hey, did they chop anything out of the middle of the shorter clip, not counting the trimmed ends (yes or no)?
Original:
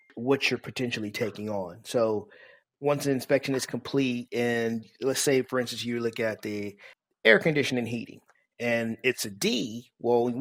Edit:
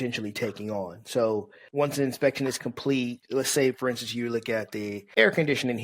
yes